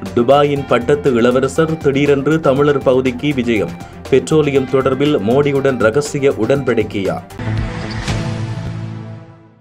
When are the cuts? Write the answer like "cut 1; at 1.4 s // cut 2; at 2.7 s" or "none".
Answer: cut 1; at 7.3 s